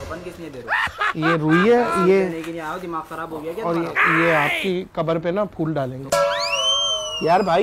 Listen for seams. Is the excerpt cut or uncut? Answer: cut